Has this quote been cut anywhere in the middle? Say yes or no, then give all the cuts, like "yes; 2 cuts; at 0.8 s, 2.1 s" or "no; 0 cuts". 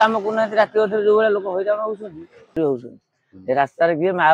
yes; 1 cut; at 2.6 s